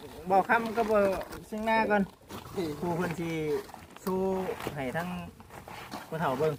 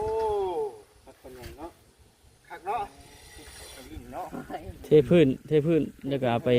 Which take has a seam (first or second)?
second